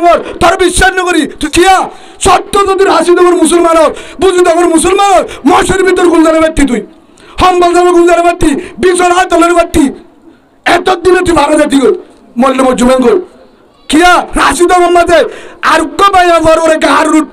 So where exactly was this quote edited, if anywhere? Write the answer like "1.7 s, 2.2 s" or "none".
1.4 s